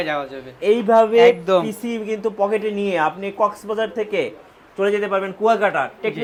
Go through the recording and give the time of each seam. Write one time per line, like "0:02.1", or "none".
none